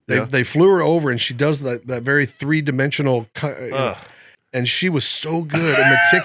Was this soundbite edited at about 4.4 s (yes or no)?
yes